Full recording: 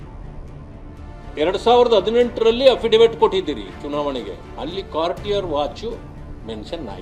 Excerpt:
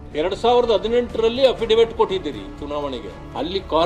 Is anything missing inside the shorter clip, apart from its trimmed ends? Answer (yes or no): no